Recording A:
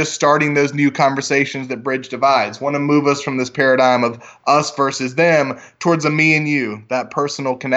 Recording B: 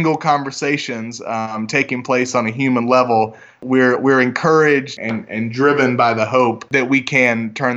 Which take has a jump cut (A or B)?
B